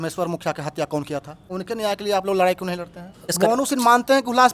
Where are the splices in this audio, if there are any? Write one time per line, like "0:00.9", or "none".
0:01.5
0:03.3